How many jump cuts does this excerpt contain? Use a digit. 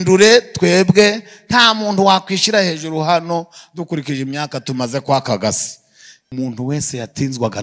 1